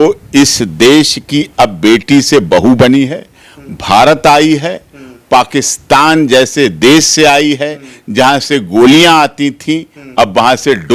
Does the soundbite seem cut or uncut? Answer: uncut